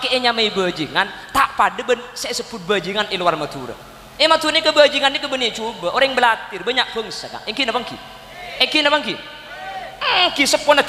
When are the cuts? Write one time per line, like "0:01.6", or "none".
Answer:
none